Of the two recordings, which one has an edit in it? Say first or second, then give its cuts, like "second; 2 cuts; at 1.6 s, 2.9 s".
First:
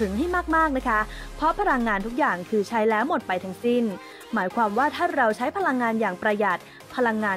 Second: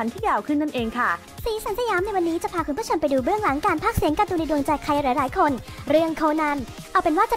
second; 1 cut; at 1.3 s